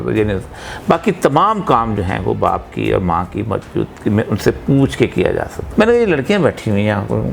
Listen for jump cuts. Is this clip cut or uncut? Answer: cut